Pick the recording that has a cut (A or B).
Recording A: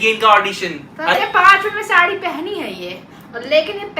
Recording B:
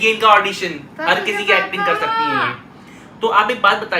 A